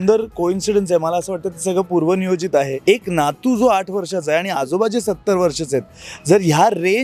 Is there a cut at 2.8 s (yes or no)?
yes